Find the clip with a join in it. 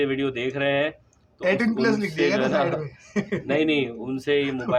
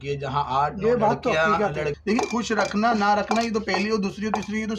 second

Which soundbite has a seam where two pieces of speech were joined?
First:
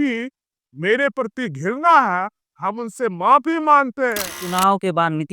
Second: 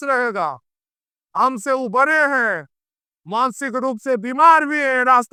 first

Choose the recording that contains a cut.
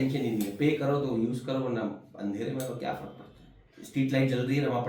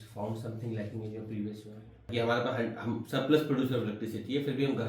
second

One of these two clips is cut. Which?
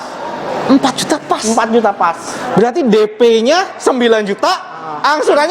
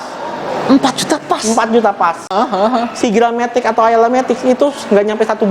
second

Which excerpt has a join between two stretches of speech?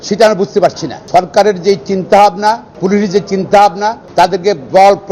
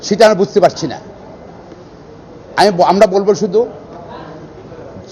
first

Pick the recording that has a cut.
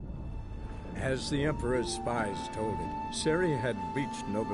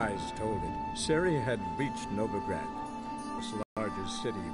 second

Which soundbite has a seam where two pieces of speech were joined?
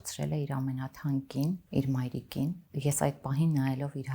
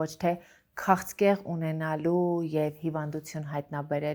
first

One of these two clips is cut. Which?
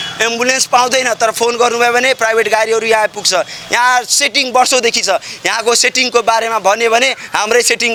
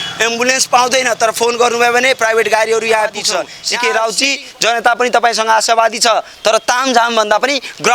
second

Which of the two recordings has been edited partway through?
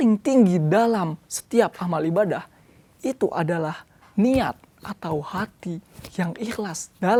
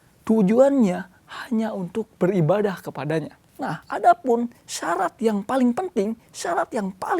second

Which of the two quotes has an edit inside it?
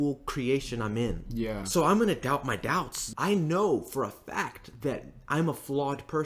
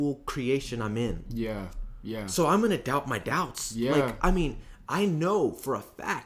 first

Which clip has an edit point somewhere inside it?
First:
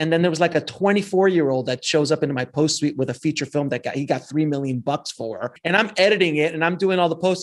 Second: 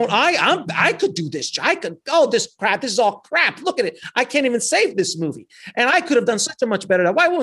first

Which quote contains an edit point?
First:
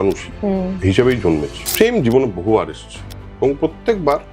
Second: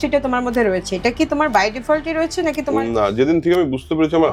first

